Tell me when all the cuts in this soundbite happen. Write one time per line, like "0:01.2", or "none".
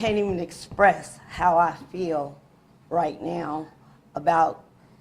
none